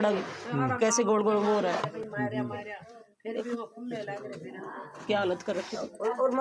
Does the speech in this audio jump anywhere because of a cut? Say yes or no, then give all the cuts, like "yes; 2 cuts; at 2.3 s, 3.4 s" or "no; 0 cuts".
no; 0 cuts